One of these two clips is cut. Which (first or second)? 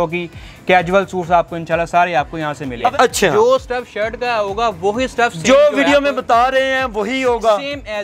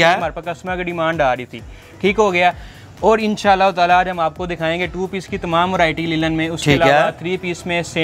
first